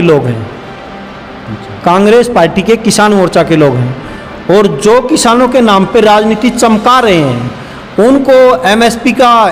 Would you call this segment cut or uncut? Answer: uncut